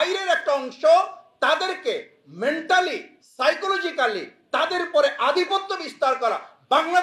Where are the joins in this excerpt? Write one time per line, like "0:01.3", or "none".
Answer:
none